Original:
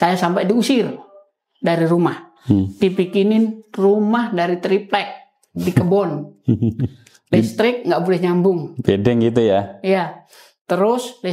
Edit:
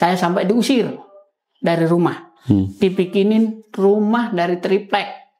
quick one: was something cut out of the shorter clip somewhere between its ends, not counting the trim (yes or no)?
no